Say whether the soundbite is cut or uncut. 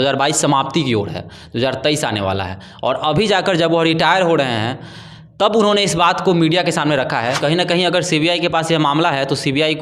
cut